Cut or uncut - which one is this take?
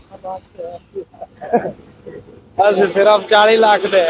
uncut